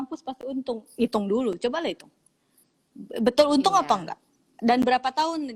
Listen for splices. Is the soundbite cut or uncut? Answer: uncut